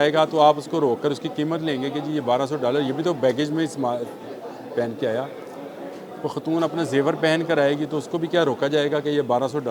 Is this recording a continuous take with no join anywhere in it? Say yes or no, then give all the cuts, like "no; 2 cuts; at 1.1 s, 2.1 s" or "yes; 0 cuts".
yes; 0 cuts